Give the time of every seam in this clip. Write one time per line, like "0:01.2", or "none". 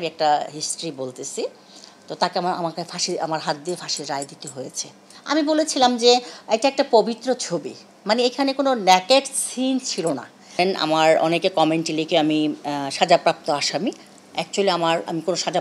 0:05.1
0:10.6